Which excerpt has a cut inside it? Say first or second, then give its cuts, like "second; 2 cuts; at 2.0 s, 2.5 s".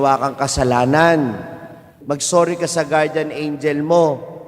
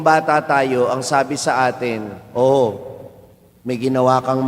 first; 1 cut; at 1.9 s